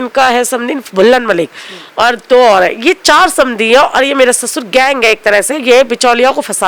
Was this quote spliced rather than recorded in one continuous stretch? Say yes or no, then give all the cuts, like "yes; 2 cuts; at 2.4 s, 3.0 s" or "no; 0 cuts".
no; 0 cuts